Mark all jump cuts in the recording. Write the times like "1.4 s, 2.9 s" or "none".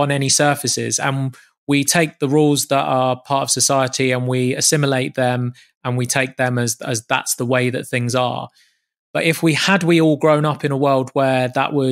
none

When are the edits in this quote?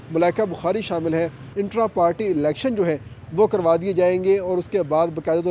1.4 s

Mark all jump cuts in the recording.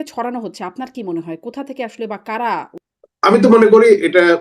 2.8 s

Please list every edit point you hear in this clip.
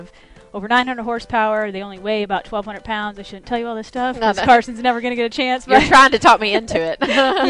none

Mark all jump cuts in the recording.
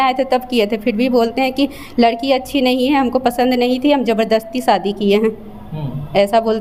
none

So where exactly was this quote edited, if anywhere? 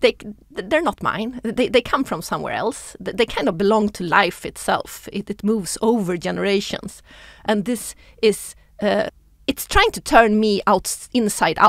9.3 s

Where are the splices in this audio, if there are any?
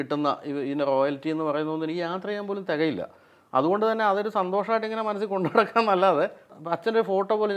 6.5 s

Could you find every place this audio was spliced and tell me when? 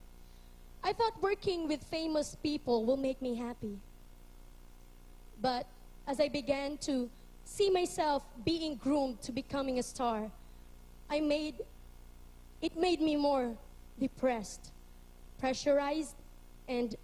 9.5 s

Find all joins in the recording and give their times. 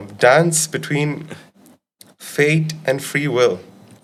none

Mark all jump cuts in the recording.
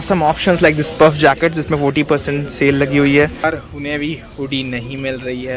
3.4 s

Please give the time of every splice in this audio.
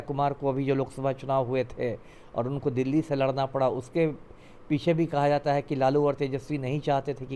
none

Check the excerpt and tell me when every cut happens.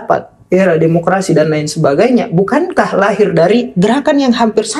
none

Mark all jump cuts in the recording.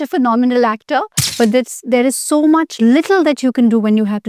1.2 s

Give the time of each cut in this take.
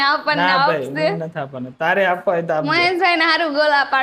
none

